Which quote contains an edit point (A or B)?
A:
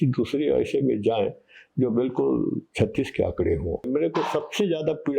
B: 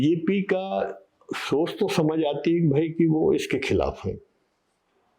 A